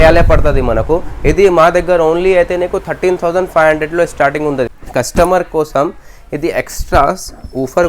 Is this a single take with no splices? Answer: no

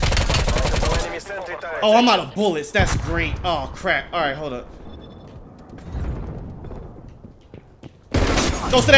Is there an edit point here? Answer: yes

